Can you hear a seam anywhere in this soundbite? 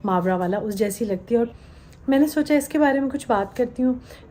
yes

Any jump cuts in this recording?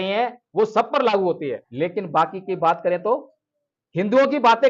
yes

